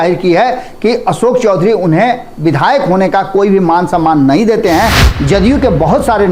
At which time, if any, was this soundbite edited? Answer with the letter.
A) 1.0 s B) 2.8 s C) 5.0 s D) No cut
C